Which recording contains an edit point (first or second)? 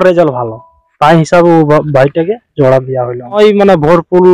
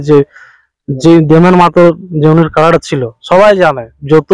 first